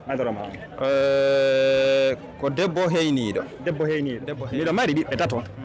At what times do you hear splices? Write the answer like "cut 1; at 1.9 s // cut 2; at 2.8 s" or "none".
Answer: cut 1; at 4.3 s